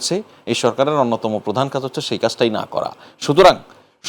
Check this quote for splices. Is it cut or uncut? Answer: uncut